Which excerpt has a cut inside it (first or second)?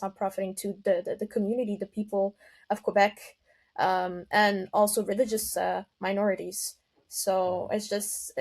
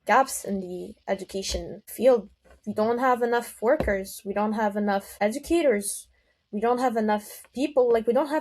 second